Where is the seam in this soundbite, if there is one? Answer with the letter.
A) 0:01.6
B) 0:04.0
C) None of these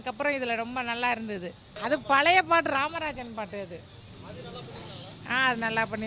A